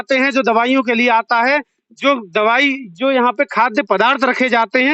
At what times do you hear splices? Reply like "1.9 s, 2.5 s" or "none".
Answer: none